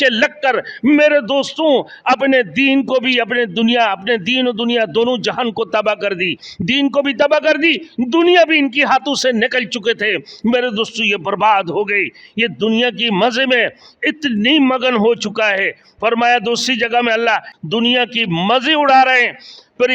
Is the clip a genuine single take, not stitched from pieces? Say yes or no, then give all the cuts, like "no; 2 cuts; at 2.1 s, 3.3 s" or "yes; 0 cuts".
no; 1 cut; at 17.5 s